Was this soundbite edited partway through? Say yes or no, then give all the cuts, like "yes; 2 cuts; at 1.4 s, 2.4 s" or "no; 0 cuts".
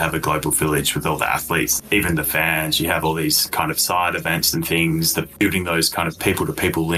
yes; 2 cuts; at 1.7 s, 5.3 s